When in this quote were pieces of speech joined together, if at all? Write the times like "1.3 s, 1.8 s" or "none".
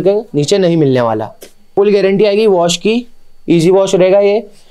1.7 s

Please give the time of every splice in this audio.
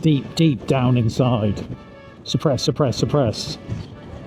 none

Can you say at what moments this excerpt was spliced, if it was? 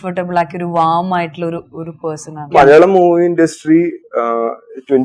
2.5 s

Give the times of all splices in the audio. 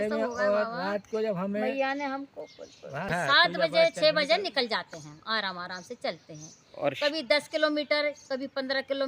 3.1 s

